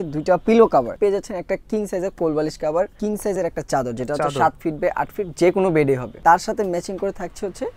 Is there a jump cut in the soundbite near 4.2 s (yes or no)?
no